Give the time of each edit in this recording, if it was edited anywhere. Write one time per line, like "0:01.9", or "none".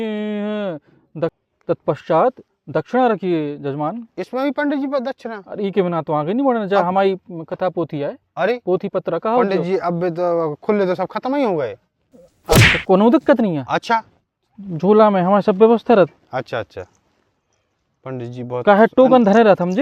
0:01.4